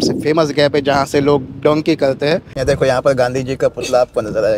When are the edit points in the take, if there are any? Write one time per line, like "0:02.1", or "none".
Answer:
0:02.5